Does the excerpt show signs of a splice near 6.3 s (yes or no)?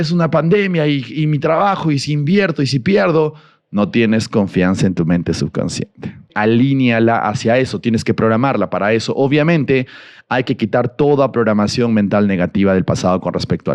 yes